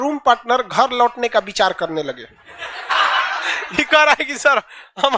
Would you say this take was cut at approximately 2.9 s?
yes; 1 cut; at 2.9 s

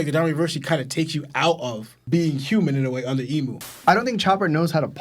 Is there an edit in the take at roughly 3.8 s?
yes; 1 cut; at 3.8 s

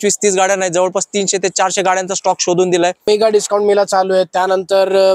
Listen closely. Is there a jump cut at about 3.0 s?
yes; 1 cut; at 3.0 s

